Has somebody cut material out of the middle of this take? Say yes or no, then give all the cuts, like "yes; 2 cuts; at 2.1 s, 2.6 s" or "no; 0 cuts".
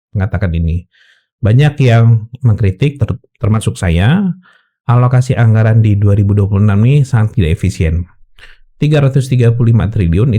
no; 0 cuts